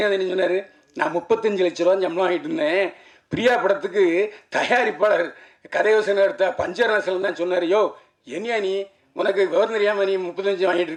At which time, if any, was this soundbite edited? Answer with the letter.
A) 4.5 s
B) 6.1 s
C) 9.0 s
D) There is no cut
D